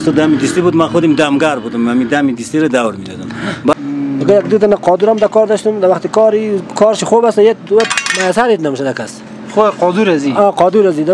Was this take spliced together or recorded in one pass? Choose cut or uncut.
cut